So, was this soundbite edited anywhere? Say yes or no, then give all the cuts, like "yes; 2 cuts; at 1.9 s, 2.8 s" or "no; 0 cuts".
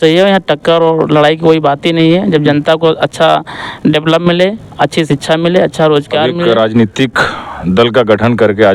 yes; 1 cut; at 6.4 s